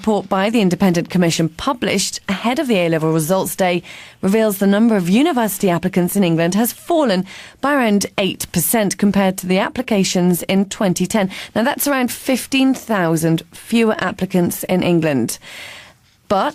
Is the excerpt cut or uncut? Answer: cut